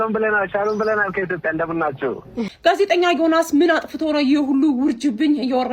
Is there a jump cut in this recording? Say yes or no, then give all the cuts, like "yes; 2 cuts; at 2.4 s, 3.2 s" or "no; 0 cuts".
yes; 1 cut; at 2.5 s